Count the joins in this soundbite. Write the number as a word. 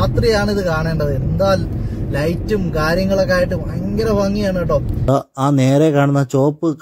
one